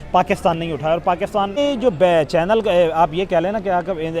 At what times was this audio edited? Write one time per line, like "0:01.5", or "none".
0:01.6